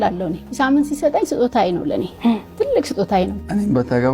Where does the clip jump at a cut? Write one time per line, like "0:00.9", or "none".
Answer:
none